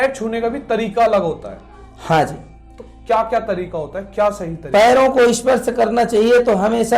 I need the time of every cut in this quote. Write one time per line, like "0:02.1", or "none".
none